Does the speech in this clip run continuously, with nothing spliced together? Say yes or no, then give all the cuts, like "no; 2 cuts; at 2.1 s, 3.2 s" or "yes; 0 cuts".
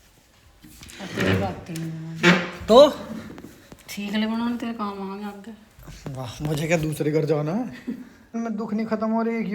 no; 1 cut; at 8.1 s